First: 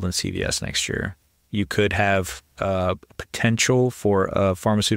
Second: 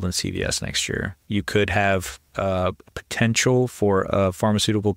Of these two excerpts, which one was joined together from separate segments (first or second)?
second